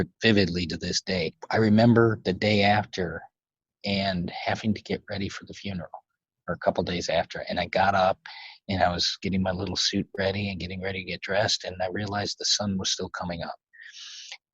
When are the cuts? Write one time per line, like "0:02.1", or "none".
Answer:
0:01.3